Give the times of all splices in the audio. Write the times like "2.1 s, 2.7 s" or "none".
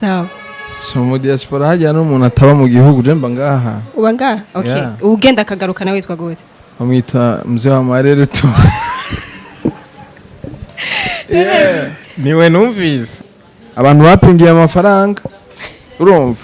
13.1 s